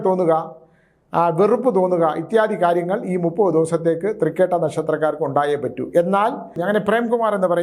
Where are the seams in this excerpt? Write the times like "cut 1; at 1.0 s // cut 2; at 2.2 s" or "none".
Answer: cut 1; at 6.6 s